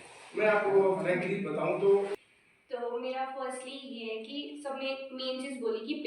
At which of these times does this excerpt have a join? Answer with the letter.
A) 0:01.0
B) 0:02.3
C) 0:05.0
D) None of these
B